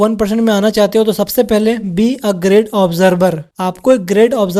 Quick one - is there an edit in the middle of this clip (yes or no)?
no